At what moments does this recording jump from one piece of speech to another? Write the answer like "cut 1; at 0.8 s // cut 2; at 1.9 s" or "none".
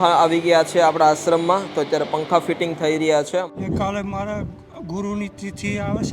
cut 1; at 3.6 s

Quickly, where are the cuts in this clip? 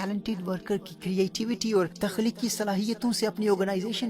cut 1; at 1.9 s

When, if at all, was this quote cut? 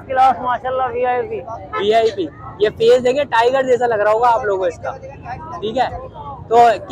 none

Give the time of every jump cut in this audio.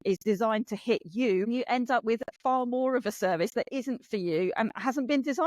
cut 1; at 1.5 s

